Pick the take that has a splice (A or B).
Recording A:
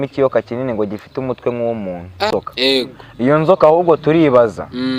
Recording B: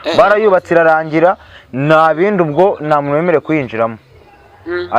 A